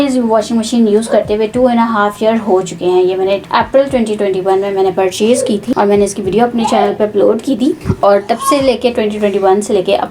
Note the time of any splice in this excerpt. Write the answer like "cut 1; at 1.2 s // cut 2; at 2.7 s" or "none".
none